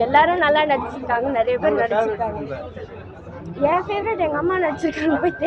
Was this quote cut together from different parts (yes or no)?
no